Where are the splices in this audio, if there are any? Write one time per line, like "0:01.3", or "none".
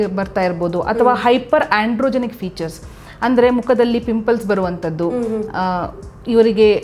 none